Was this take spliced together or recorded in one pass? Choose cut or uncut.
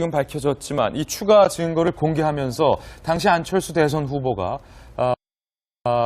cut